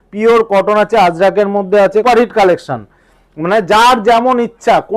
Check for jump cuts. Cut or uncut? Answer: cut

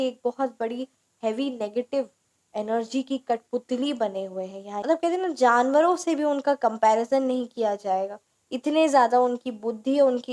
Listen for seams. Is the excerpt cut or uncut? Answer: cut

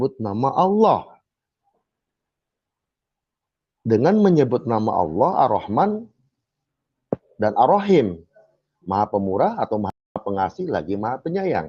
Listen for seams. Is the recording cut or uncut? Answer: uncut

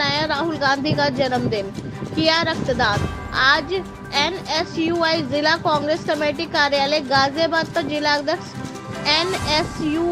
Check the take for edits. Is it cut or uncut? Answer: uncut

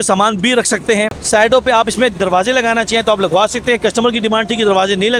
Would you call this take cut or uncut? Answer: uncut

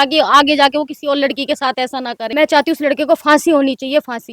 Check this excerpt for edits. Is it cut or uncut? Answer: cut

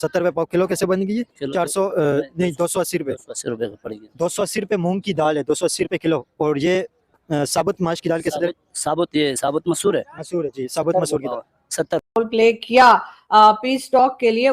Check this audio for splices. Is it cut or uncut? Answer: cut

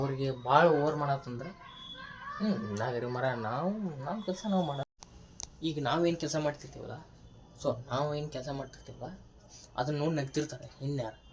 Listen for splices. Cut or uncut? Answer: cut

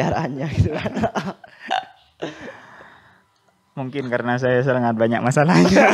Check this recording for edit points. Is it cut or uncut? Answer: uncut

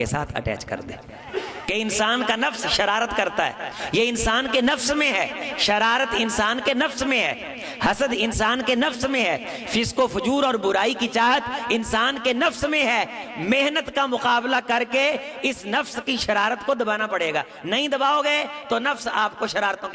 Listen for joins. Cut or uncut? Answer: cut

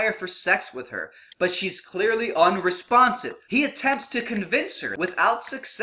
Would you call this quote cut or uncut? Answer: cut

